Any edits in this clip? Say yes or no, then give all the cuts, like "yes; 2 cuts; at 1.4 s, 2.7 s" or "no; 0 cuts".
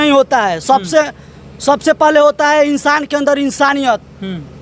no; 0 cuts